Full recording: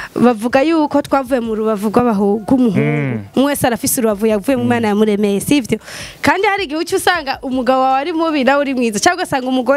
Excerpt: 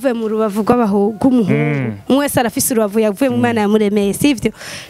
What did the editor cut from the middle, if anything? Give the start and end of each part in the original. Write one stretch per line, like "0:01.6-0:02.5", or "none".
none